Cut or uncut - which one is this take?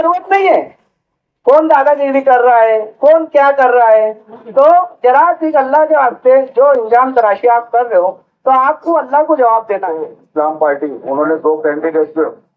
cut